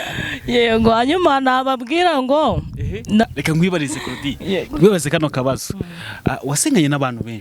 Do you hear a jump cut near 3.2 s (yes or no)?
yes